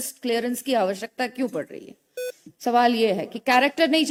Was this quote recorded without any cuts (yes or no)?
yes